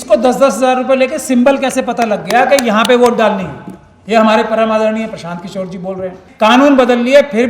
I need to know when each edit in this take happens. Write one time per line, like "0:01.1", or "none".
0:06.2